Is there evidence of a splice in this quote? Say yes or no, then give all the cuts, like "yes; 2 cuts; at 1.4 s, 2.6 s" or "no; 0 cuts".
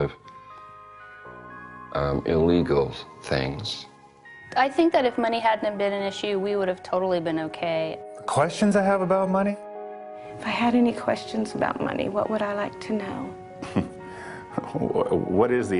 yes; 1 cut; at 7.7 s